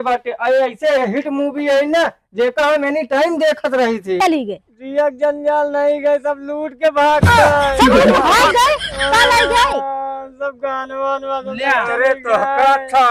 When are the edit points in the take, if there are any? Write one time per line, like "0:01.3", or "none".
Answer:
0:03.9